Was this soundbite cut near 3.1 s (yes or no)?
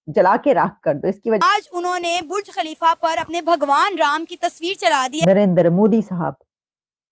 no